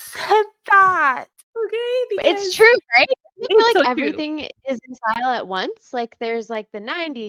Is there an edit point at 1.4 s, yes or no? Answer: yes